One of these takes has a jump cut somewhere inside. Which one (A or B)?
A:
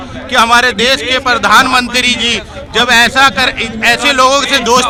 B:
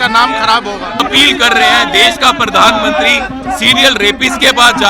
B